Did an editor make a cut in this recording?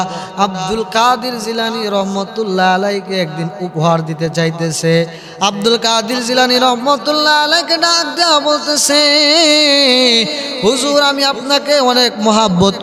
no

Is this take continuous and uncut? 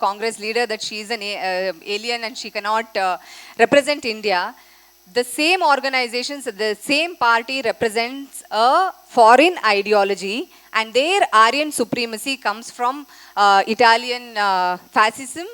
yes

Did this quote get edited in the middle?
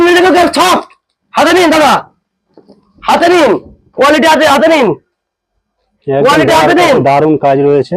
no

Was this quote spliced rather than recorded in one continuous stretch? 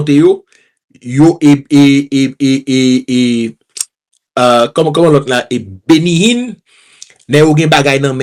no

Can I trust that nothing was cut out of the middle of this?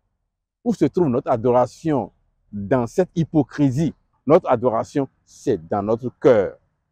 no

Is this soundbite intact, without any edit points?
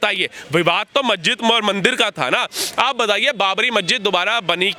yes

